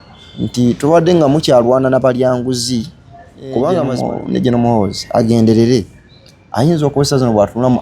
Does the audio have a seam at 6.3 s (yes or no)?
no